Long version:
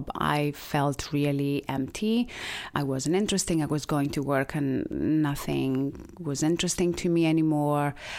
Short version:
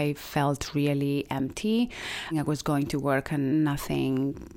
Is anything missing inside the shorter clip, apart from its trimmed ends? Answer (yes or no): yes